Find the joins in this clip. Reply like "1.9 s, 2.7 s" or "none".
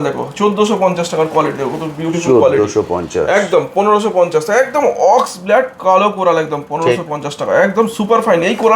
none